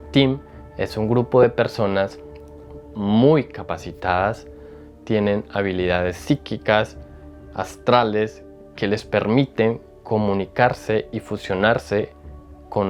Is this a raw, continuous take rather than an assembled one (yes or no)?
yes